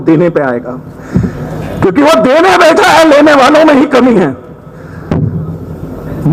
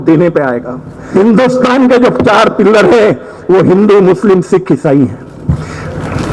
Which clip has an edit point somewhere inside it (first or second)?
second